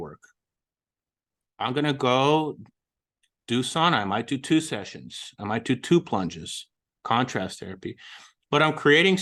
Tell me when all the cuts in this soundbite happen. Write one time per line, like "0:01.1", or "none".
none